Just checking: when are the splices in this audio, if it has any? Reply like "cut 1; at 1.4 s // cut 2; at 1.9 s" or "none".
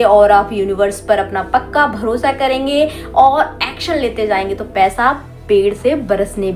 none